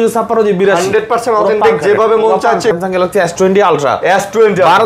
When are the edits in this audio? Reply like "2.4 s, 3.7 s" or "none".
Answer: 2.8 s